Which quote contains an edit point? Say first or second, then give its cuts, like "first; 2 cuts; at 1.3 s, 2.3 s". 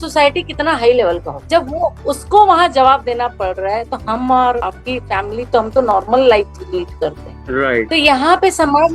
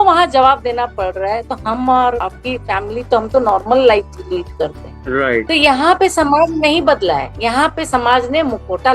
first; 1 cut; at 1.4 s